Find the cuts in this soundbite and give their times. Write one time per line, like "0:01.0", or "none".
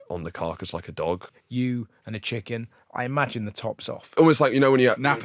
0:01.3
0:04.2